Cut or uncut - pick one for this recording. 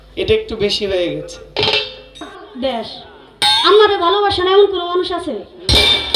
cut